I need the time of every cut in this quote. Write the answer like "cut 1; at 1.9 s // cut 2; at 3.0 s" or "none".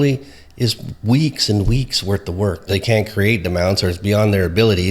cut 1; at 2.7 s